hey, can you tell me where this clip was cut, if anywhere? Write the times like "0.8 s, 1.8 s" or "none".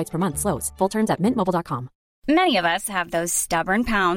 2.1 s

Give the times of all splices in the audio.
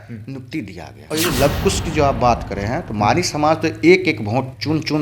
0.9 s

